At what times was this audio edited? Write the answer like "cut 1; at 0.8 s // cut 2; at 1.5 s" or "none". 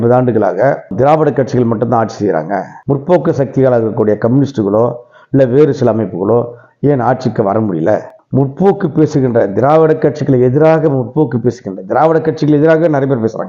none